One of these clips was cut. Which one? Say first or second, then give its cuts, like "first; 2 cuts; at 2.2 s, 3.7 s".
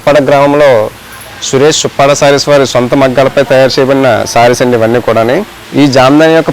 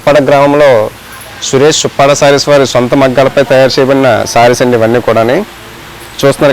first; 1 cut; at 5.6 s